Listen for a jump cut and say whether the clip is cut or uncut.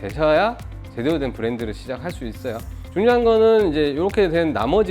cut